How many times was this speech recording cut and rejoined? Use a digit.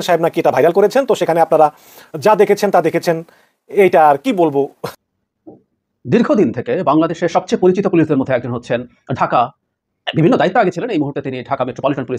1